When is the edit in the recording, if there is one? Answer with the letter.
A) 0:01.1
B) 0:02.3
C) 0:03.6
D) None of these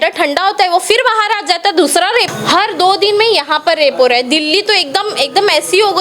B